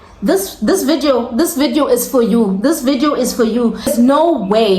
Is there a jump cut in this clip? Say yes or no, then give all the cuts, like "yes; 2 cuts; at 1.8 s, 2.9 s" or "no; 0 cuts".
yes; 1 cut; at 3.9 s